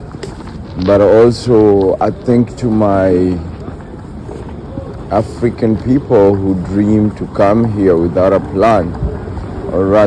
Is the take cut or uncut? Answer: uncut